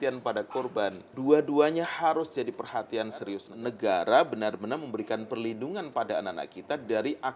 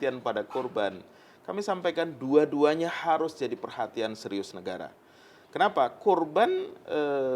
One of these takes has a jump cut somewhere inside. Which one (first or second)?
first